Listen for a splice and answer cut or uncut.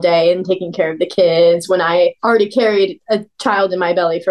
cut